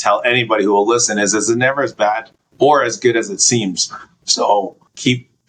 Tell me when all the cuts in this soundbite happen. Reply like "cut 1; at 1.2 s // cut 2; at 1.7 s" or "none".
none